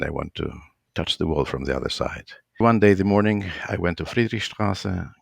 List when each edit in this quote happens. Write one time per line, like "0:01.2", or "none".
0:02.6

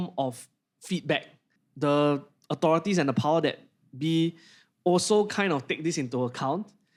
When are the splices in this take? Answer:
none

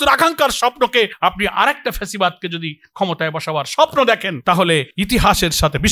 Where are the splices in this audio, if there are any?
0:01.1
0:04.7

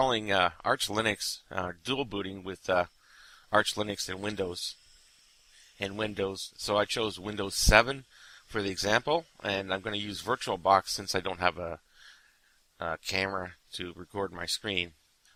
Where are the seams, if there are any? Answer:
none

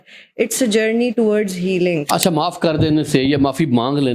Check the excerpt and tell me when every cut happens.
0:02.1

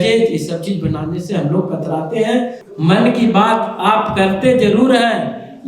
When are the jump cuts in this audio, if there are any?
0:02.6

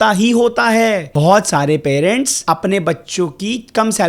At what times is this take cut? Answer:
0:01.1
0:02.4

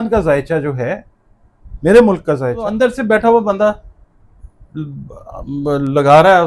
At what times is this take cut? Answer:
0:02.6

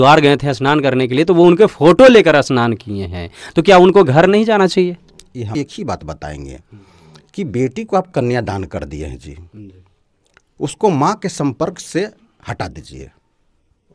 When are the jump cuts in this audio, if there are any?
0:05.5

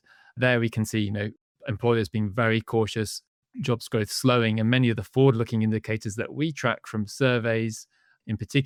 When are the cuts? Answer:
none

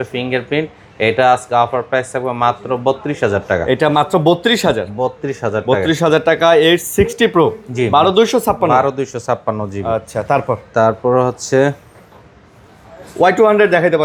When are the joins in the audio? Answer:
none

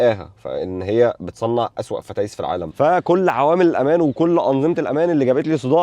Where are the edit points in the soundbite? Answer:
0:02.7

